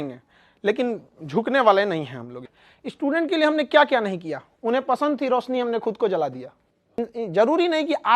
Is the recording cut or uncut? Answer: cut